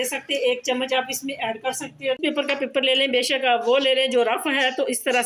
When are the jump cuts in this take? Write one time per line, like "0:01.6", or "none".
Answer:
0:02.2